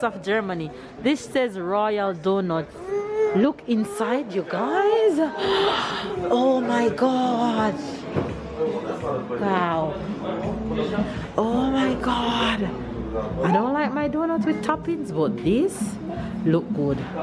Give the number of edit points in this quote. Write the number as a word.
zero